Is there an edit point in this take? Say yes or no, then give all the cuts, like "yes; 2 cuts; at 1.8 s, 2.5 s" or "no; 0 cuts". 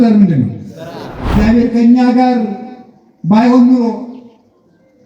yes; 1 cut; at 1.2 s